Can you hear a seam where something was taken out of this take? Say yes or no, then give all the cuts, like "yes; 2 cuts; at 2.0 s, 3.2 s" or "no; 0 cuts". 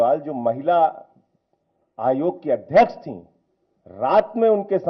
no; 0 cuts